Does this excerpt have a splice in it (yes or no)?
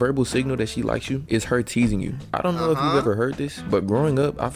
no